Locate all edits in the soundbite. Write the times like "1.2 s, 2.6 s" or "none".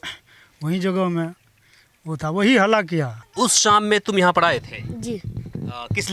3.2 s